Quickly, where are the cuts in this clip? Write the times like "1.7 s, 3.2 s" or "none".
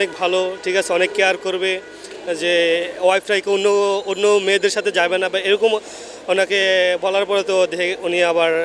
none